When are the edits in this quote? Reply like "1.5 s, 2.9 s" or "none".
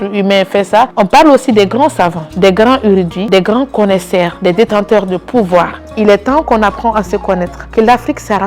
0.9 s, 2.2 s, 3.2 s, 4.3 s, 5.8 s, 7.6 s